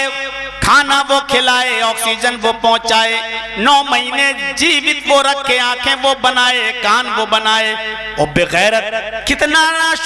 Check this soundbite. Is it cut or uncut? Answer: uncut